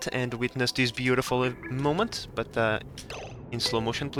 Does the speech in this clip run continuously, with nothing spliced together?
yes; 0 cuts

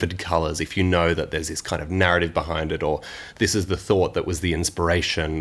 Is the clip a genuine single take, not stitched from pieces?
yes; 0 cuts

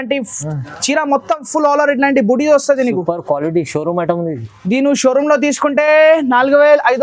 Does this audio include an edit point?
no; 0 cuts

